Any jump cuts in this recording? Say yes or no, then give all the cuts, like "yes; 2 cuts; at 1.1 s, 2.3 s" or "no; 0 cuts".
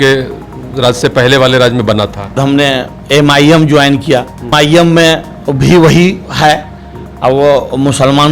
yes; 2 cuts; at 2.4 s, 4.5 s